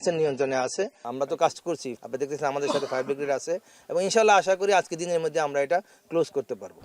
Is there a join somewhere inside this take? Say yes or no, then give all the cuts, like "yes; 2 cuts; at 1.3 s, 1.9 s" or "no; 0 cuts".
yes; 2 cuts; at 1.0 s, 1.9 s